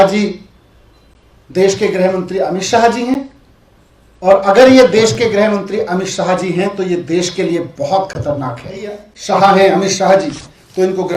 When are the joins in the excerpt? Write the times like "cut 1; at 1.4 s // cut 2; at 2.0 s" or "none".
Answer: cut 1; at 9.1 s